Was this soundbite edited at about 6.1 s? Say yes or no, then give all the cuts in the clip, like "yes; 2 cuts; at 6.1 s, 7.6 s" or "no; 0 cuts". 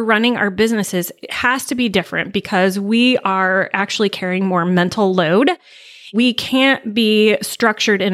yes; 1 cut; at 6.1 s